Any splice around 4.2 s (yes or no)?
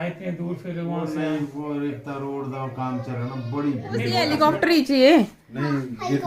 yes